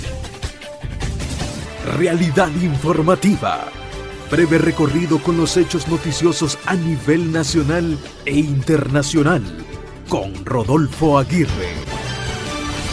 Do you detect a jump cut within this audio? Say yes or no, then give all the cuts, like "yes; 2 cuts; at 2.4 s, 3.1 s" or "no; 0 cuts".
no; 0 cuts